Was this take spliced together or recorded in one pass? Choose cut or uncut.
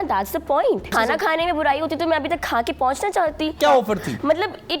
cut